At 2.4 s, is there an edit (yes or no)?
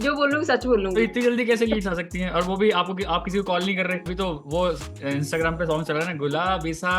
no